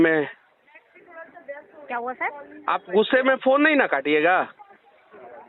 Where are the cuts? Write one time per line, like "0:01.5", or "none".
none